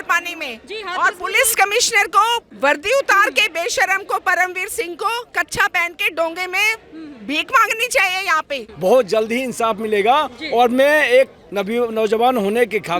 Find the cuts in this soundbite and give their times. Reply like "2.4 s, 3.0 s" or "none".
2.5 s, 8.6 s